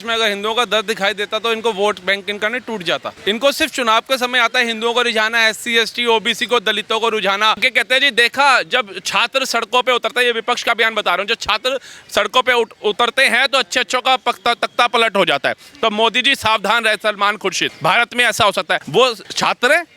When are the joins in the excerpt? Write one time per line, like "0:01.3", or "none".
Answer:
0:03.1
0:07.6
0:17.7
0:18.9